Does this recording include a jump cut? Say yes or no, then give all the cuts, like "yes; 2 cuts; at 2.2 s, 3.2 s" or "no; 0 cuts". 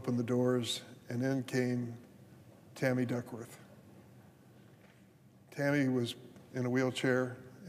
yes; 2 cuts; at 1.5 s, 6.6 s